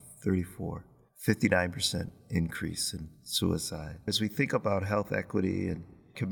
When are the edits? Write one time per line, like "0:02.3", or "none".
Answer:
0:04.1